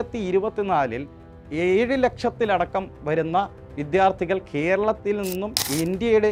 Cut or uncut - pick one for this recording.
uncut